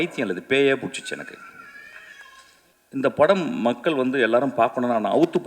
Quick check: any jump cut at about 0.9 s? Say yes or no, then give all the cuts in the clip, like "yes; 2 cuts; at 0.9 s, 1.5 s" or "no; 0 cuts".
no; 1 cut; at 2.8 s